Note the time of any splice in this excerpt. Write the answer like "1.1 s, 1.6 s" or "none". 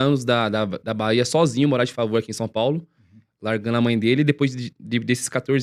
none